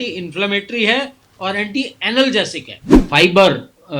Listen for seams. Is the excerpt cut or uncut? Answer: cut